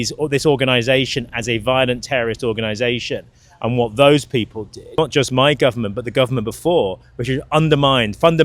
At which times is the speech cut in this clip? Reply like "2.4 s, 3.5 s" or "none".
4.8 s